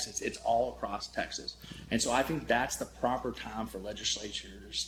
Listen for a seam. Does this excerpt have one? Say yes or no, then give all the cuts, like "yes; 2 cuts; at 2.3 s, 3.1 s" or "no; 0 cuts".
no; 0 cuts